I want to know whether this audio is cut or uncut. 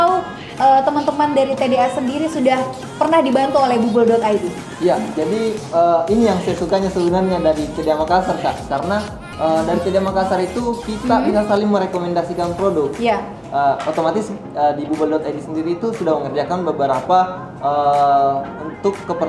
uncut